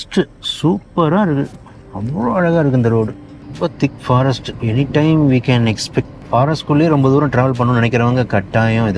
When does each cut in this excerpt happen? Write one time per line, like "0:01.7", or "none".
0:03.4
0:06.2